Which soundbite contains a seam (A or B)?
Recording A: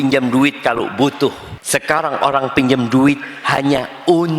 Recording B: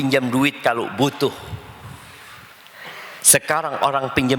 A